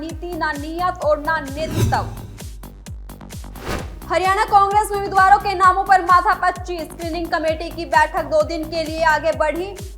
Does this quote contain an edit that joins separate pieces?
yes; 2 cuts; at 2.1 s, 3.5 s

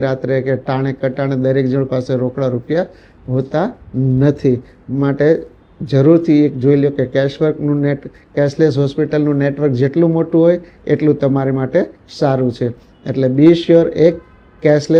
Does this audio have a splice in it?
no; 0 cuts

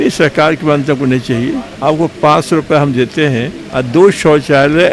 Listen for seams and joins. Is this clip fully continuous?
no; 2 cuts; at 1.7 s, 3.6 s

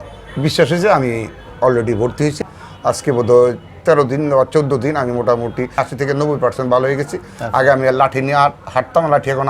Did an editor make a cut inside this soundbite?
yes; 1 cut; at 2.4 s

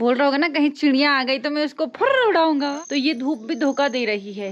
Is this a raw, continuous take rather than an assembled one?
no; 1 cut; at 2.7 s

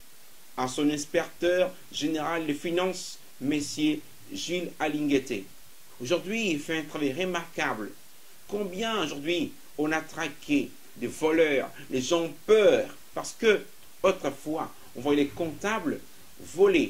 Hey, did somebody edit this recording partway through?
no; 0 cuts

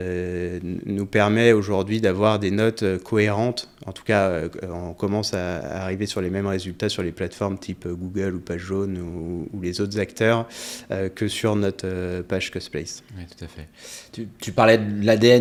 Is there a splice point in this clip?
no; 0 cuts

